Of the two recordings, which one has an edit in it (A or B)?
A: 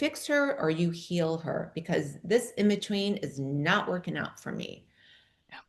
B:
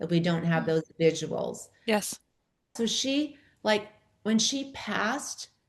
B